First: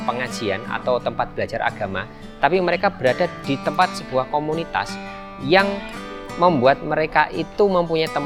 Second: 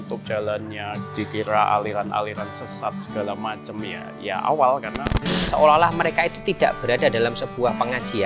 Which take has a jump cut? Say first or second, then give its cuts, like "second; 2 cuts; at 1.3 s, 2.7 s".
second; 2 cuts; at 1.0 s, 5.4 s